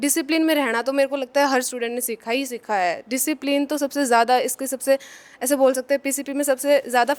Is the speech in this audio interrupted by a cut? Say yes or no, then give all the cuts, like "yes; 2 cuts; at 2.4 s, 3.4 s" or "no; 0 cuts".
no; 0 cuts